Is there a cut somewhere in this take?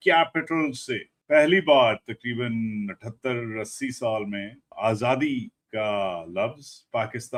no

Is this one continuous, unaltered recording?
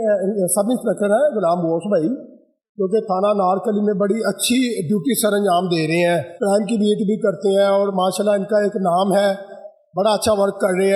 yes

